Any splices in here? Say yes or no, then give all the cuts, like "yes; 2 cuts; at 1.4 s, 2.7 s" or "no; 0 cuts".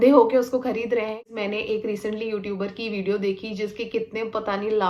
yes; 1 cut; at 1.3 s